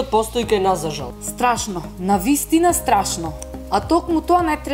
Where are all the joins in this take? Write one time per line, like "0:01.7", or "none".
0:01.0
0:03.4